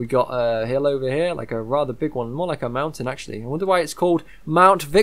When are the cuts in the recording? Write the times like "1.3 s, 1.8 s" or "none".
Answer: none